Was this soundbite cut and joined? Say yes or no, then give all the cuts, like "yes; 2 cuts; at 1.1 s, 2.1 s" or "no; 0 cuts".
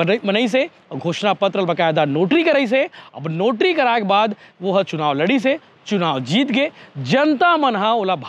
no; 0 cuts